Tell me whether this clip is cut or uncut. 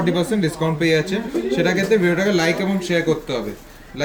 uncut